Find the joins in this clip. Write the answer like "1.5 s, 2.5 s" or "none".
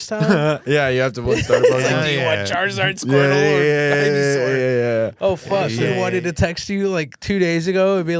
5.8 s